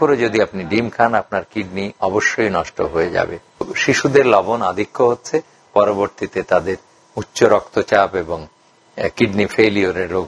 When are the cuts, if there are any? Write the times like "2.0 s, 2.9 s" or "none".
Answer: 3.7 s